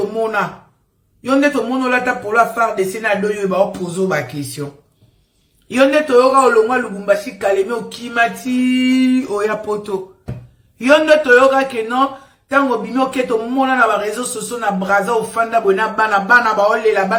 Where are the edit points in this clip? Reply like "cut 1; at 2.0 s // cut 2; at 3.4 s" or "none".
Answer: none